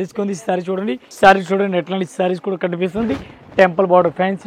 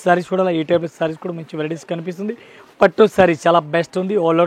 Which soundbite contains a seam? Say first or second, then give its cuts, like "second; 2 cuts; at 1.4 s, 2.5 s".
first; 1 cut; at 1.0 s